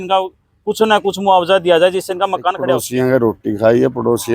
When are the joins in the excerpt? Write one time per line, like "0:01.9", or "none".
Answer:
0:02.7